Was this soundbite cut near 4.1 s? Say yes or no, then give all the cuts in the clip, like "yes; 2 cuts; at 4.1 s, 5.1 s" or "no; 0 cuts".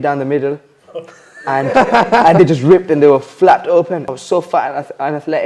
yes; 1 cut; at 4.1 s